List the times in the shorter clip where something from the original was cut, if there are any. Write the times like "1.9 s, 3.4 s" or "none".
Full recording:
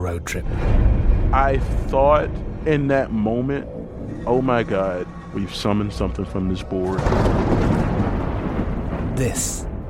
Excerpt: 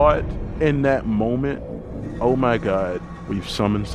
none